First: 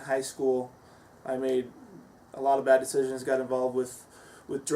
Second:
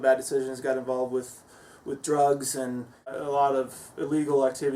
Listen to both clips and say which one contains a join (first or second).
second